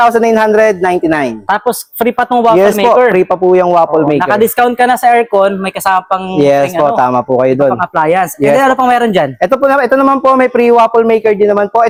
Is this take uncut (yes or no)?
yes